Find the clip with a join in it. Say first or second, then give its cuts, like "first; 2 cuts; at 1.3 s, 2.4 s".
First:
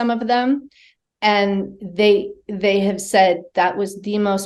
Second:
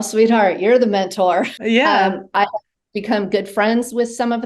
second; 1 cut; at 1.6 s